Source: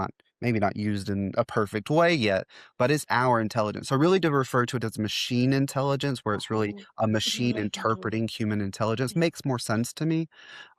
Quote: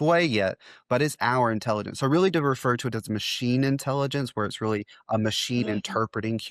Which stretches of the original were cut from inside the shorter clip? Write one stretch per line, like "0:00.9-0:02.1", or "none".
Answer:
none